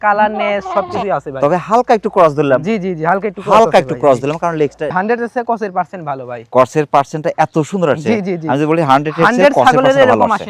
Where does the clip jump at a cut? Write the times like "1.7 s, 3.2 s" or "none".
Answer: 4.9 s